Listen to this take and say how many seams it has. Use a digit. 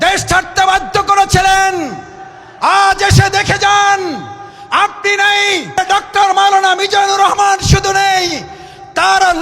1